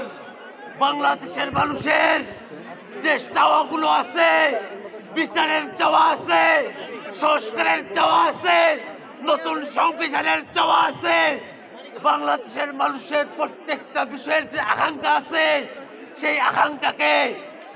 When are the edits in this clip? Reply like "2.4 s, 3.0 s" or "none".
none

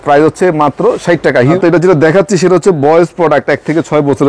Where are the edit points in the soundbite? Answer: 1.6 s

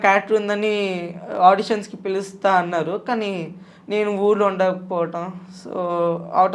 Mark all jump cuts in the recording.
none

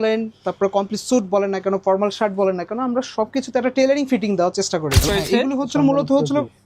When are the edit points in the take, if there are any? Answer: 5.0 s

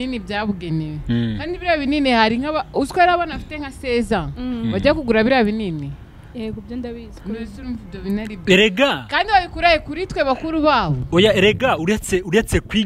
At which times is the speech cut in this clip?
none

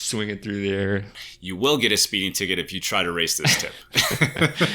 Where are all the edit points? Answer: 1.2 s

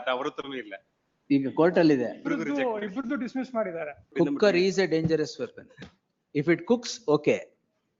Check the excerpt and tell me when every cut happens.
4.1 s

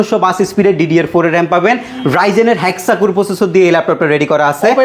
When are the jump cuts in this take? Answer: 1.9 s

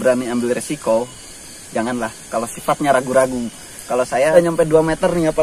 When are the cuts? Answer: 4.3 s

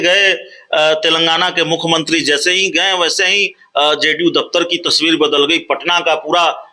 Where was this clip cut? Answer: none

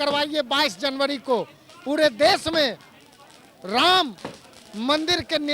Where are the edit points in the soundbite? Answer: none

